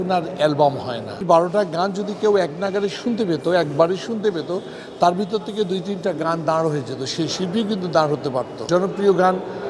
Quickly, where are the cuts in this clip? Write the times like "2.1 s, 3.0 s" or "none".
1.2 s, 8.6 s